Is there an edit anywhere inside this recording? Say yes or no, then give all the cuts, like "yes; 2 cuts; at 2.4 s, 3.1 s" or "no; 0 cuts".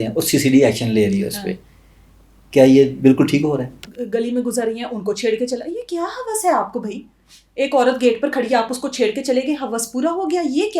yes; 1 cut; at 3.8 s